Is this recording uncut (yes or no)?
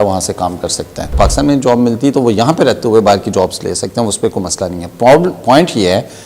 no